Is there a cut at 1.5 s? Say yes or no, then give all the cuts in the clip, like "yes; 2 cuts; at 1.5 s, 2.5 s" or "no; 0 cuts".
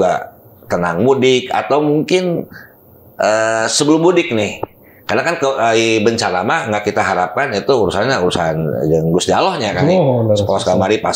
no; 0 cuts